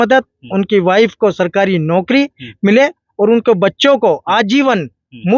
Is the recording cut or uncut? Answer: uncut